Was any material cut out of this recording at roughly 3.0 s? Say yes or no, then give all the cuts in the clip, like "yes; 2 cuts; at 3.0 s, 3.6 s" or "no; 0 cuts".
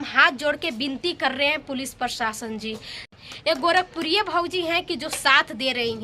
yes; 1 cut; at 3.0 s